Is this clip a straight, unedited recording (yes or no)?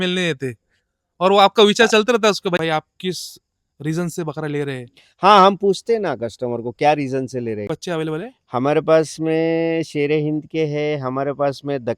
no